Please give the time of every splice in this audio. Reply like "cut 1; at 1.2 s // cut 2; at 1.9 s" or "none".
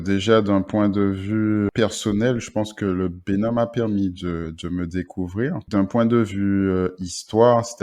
cut 1; at 1.7 s